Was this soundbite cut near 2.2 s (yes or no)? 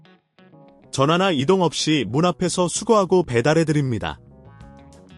no